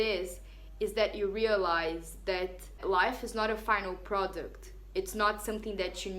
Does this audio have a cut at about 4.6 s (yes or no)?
no